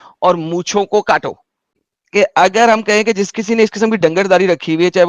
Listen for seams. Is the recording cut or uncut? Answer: cut